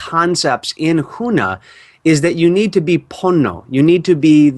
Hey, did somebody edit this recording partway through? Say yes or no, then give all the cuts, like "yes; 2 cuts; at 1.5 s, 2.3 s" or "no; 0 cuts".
yes; 1 cut; at 3.1 s